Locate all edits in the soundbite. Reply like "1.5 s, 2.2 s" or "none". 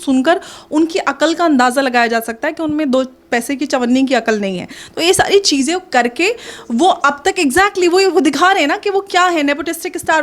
none

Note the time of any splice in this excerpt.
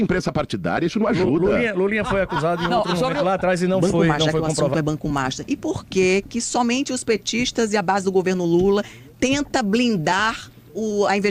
4.7 s

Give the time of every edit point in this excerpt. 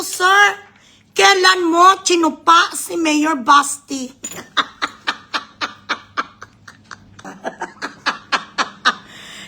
7.3 s

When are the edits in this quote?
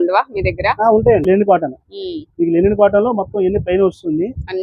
1.2 s

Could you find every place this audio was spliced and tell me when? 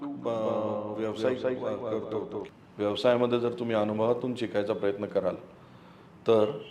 2.3 s

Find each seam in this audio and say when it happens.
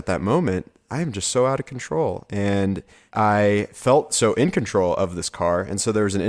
2.9 s, 3.7 s

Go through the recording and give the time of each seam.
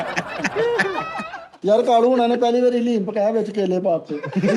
1.4 s

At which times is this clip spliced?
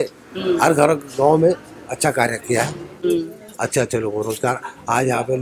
none

